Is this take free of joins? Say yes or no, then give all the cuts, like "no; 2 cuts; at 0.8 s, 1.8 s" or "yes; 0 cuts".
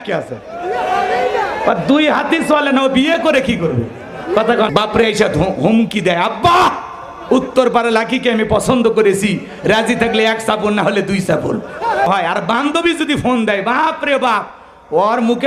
no; 2 cuts; at 4.7 s, 12.1 s